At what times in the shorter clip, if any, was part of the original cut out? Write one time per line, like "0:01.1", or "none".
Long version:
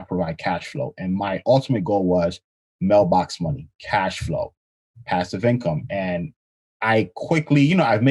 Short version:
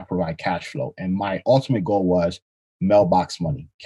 none

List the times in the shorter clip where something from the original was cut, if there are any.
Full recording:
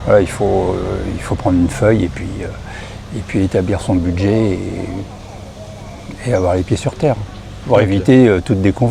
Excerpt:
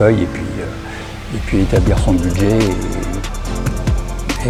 none

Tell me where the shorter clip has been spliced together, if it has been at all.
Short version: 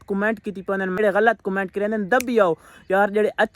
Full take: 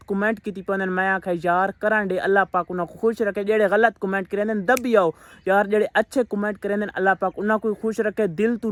0:01.0

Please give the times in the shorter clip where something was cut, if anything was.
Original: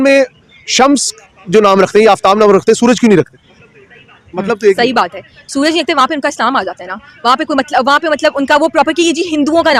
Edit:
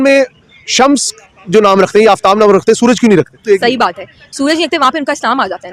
0:03.4

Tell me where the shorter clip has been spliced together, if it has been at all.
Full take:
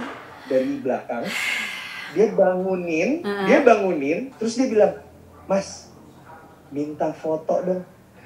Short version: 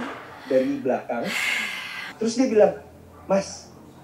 0:02.1

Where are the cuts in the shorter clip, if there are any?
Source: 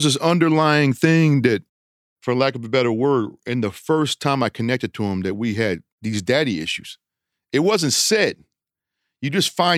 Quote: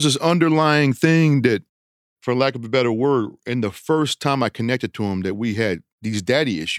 none

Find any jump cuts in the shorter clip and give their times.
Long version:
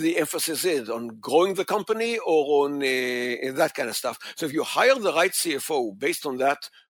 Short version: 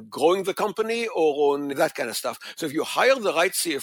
0:01.7

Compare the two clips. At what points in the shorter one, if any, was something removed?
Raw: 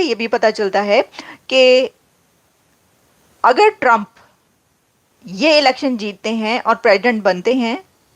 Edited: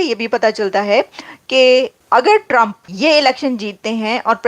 0:02.0
0:02.8

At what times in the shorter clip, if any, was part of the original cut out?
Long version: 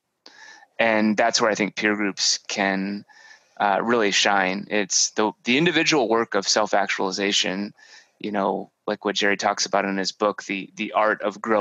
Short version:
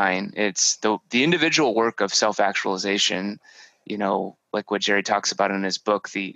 none

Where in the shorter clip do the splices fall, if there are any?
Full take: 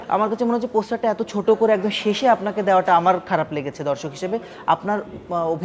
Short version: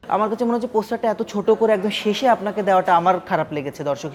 none

